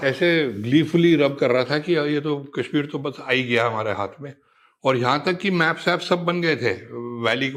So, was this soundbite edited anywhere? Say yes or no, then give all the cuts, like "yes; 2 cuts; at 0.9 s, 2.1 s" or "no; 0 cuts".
no; 0 cuts